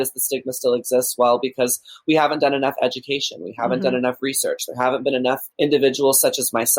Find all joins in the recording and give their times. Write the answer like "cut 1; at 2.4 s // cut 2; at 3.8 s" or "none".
cut 1; at 5.5 s